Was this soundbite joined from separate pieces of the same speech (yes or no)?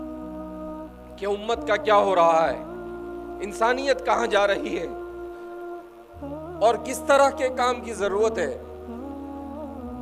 no